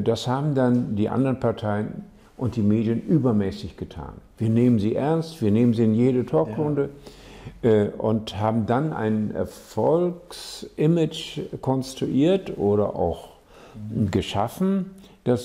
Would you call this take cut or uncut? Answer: uncut